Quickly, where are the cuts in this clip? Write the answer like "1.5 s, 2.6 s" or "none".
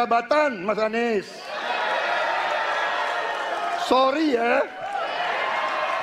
none